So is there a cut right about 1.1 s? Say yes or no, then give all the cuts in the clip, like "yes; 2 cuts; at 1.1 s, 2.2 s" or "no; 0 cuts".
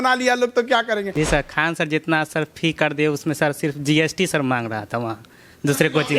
yes; 1 cut; at 1.1 s